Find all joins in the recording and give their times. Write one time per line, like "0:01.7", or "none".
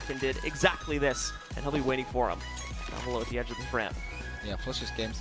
0:03.7